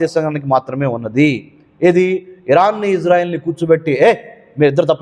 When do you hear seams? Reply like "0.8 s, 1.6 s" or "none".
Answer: none

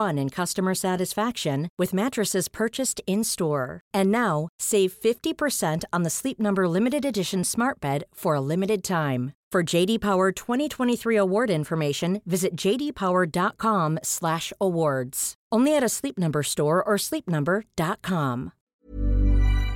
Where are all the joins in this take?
18.6 s

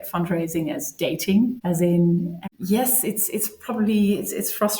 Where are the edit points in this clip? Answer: 2.1 s

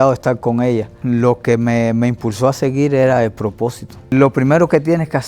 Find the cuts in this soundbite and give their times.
0.9 s, 4.1 s

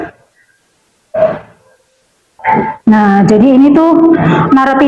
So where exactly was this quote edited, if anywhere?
2.3 s

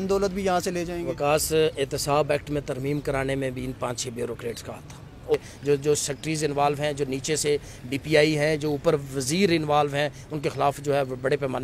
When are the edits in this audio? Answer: 5.3 s

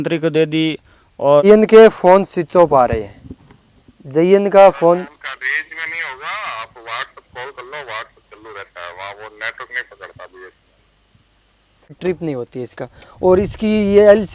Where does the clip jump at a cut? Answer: 1.4 s, 12.0 s

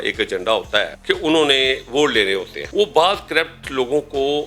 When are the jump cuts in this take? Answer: 0.9 s, 2.6 s

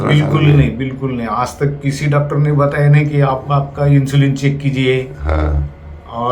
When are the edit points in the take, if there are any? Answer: none

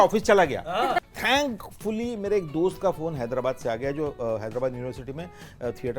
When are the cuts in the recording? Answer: 1.1 s

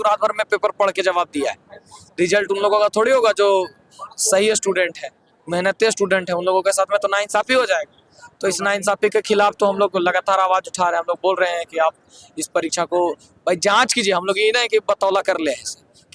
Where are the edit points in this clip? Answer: none

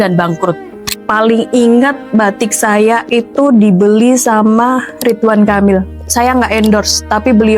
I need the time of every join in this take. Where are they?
1.0 s

